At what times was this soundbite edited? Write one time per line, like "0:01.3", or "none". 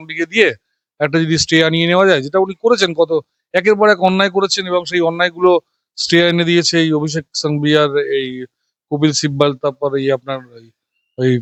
none